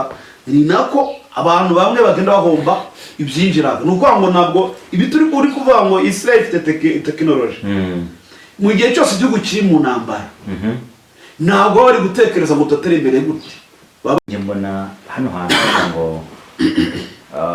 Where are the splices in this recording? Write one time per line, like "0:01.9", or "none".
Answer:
0:14.2